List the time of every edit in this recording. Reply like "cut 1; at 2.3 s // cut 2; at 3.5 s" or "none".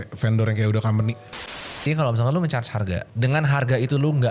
cut 1; at 1.7 s // cut 2; at 3.1 s